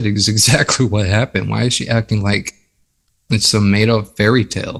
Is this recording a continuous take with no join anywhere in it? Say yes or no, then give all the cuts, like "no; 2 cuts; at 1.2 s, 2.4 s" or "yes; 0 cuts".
yes; 0 cuts